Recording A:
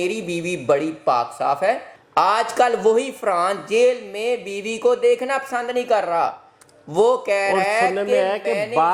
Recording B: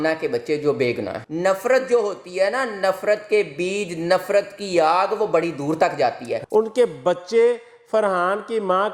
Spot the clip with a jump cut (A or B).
B